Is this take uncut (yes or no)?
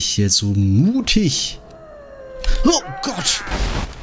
yes